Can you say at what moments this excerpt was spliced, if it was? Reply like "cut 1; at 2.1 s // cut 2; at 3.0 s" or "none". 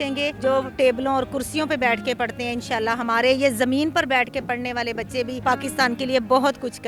none